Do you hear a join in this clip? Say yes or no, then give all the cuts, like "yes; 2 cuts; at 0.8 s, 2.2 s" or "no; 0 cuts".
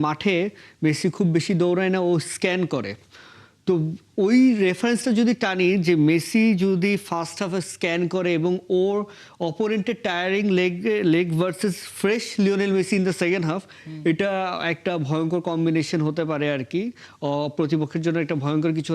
no; 0 cuts